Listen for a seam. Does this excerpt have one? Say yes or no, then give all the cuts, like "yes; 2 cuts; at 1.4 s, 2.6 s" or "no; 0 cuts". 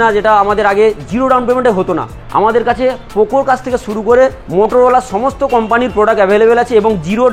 no; 0 cuts